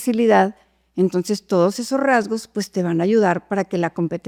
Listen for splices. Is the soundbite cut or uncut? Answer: uncut